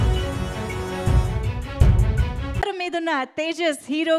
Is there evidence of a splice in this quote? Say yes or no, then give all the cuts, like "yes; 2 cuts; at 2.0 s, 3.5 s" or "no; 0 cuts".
yes; 1 cut; at 2.6 s